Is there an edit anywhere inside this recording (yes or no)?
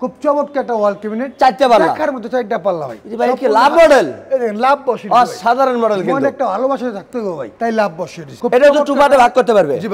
no